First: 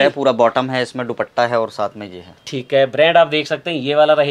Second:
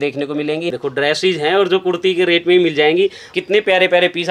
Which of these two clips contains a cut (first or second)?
second